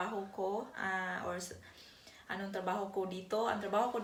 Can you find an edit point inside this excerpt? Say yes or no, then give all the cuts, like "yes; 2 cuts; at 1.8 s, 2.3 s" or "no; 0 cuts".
no; 0 cuts